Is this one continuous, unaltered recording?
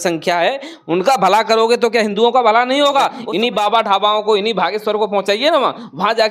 no; 1 cut; at 3.2 s

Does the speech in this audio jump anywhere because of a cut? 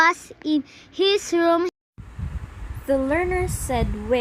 no; 0 cuts

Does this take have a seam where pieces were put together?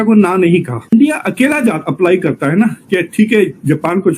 yes; 1 cut; at 0.9 s

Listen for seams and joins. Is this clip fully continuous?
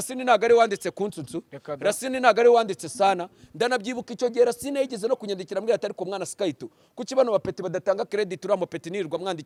yes; 0 cuts

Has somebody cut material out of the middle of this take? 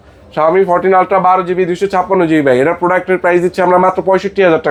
no; 0 cuts

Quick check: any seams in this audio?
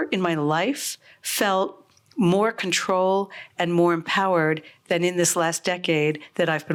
no; 0 cuts

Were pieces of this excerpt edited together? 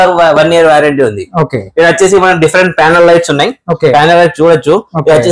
no; 0 cuts

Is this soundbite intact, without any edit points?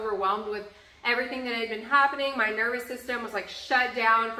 yes; 0 cuts

